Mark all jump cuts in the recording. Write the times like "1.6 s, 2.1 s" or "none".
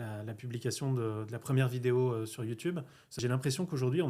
3.2 s